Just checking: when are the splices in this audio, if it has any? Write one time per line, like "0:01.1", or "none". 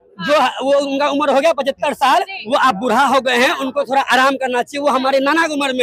none